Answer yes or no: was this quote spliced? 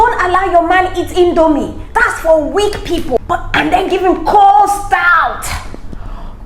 yes